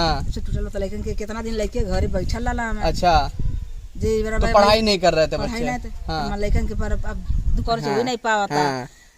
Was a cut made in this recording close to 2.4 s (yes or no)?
no